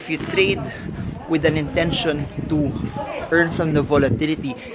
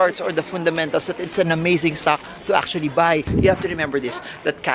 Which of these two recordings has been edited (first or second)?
second